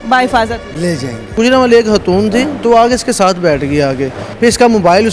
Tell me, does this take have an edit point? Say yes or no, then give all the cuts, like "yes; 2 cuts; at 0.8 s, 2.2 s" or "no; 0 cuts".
yes; 2 cuts; at 1.3 s, 4.2 s